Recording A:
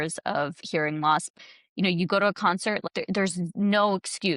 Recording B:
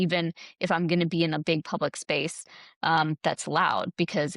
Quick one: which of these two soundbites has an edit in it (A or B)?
A